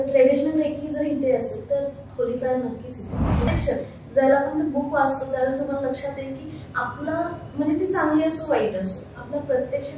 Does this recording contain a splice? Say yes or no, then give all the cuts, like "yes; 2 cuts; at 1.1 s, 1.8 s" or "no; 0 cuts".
yes; 1 cut; at 3.5 s